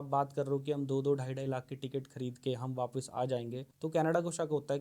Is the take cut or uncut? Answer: cut